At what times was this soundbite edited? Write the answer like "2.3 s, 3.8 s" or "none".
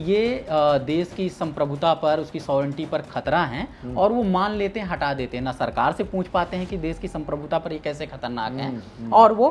none